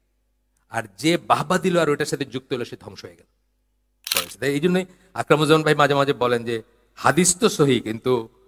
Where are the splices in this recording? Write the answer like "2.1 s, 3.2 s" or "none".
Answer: 4.1 s